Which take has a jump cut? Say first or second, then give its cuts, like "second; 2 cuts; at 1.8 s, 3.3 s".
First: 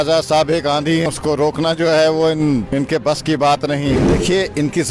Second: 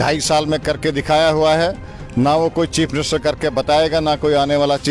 first; 3 cuts; at 1.1 s, 2.7 s, 4.0 s